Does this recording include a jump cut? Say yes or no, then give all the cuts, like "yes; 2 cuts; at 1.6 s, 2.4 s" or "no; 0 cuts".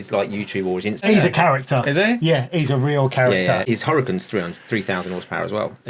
yes; 2 cuts; at 1.0 s, 3.6 s